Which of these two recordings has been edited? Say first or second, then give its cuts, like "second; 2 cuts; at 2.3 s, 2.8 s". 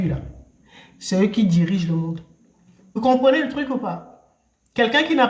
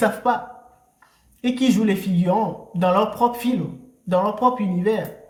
first; 1 cut; at 3.0 s